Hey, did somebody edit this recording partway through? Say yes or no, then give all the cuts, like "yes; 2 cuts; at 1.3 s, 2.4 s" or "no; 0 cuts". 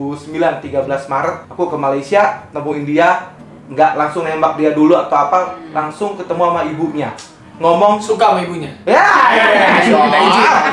no; 0 cuts